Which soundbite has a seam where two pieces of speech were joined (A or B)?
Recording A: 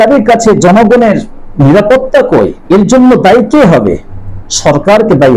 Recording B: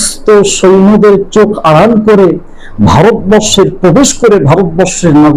A